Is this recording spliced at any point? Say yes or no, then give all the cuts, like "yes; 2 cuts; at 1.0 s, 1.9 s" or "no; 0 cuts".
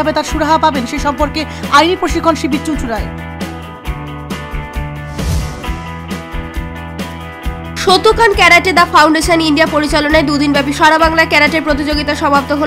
no; 0 cuts